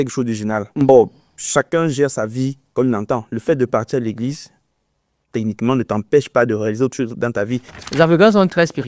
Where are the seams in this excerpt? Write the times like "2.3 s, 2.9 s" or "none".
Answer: 7.7 s